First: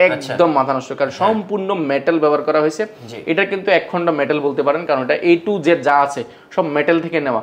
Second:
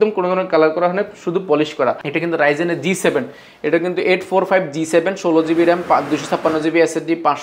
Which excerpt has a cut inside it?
second; 1 cut; at 2.0 s

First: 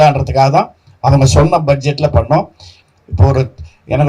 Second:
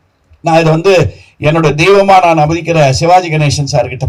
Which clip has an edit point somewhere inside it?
first; 1 cut; at 2.8 s

